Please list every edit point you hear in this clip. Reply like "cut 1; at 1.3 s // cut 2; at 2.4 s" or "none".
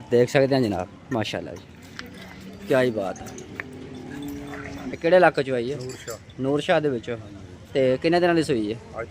cut 1; at 5.0 s